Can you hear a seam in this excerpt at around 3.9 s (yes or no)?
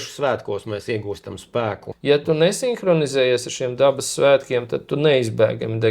no